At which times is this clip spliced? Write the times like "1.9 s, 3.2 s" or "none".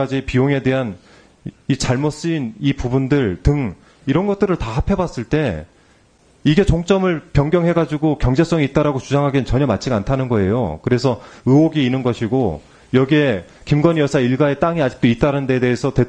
none